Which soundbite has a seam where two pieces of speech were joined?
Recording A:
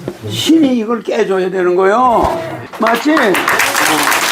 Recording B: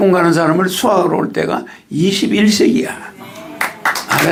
A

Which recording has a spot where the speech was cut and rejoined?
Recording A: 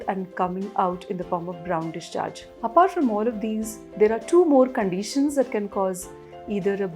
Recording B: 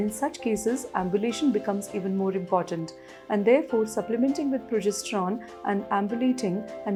A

